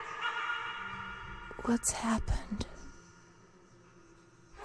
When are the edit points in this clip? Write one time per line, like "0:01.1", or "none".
0:01.4